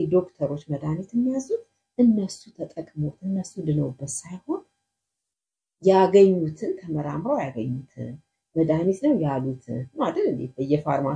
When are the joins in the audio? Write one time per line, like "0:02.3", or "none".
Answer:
none